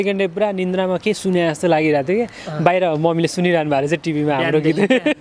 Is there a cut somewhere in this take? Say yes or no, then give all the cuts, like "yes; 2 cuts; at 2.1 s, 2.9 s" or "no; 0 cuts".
no; 0 cuts